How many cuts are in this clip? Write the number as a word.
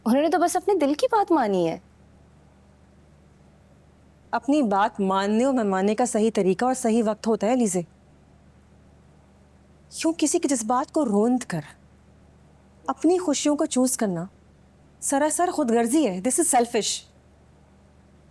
one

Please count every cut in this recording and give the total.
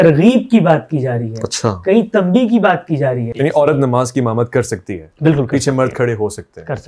one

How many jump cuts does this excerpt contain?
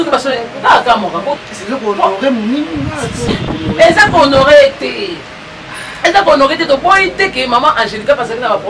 one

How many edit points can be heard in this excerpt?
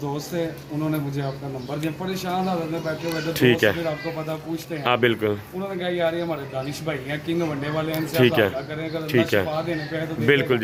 zero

